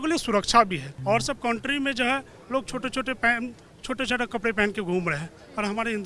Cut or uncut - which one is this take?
cut